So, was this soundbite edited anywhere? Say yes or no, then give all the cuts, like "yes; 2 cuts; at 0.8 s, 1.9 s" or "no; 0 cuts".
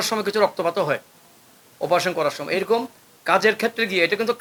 no; 0 cuts